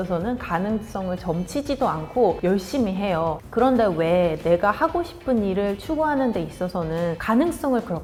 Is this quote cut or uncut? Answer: uncut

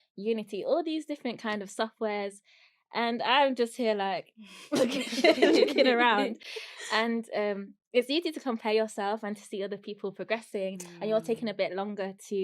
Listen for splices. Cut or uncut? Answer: uncut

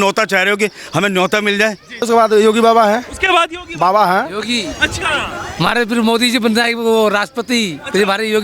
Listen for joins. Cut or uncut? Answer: cut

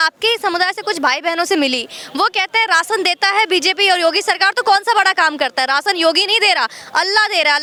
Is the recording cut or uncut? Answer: uncut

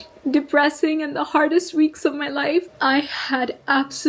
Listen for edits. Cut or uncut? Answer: cut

